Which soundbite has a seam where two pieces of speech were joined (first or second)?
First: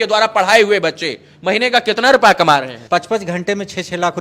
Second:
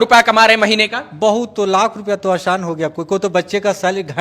first